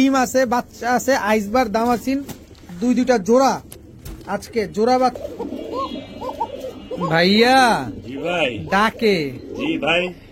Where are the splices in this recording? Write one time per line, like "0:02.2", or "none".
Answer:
0:05.2